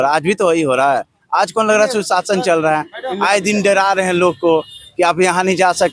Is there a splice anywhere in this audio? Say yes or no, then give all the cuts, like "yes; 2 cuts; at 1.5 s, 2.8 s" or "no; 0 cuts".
no; 0 cuts